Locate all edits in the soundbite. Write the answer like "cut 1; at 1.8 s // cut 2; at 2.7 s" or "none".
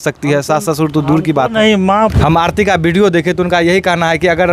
cut 1; at 2.1 s